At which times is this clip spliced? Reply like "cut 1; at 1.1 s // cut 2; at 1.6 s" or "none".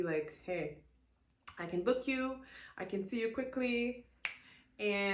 none